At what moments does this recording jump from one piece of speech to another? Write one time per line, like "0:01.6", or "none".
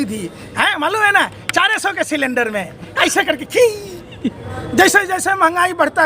0:04.5